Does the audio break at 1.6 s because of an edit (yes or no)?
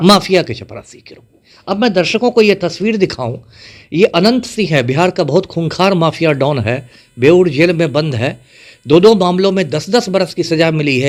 no